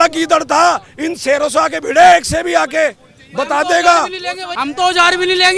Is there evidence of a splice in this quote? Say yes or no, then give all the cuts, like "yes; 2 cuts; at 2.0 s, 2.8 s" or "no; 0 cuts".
yes; 1 cut; at 4.5 s